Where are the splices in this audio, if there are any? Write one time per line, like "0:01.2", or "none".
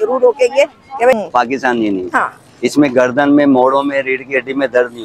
0:01.1